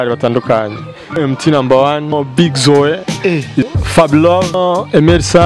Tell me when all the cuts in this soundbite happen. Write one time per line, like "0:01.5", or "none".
0:01.2
0:02.1
0:03.7
0:04.5